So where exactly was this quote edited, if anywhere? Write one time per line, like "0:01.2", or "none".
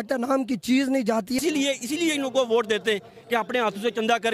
0:01.4